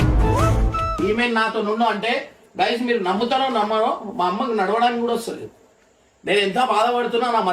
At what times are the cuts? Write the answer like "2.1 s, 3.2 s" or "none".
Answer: 0.9 s